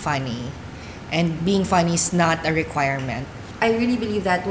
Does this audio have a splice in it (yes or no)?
yes